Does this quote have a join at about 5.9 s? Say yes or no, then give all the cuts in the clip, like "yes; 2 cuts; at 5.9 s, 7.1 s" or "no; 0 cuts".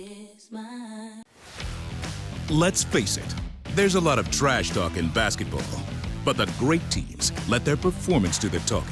no; 1 cut; at 1.0 s